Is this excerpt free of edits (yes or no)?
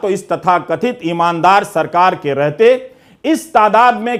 yes